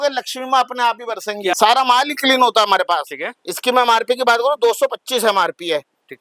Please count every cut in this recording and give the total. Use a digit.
1